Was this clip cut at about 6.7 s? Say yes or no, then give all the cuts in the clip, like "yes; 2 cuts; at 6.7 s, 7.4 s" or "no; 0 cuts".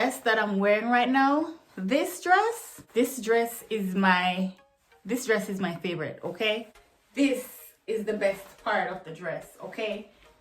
yes; 2 cuts; at 2.8 s, 6.7 s